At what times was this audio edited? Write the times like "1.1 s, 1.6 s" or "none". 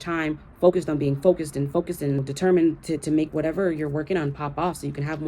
2.3 s